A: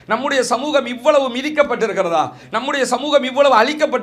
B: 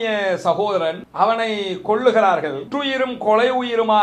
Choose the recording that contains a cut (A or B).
B